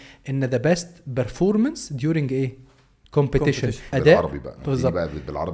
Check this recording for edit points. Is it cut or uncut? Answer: cut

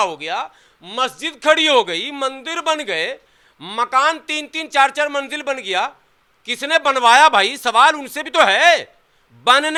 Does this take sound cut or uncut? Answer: uncut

